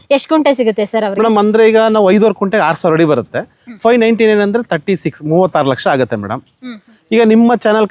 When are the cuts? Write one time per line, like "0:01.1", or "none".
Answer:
none